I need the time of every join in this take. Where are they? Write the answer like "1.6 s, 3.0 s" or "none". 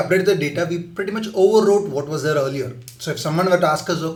none